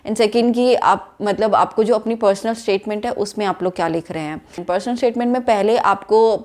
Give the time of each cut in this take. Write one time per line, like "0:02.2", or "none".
0:04.5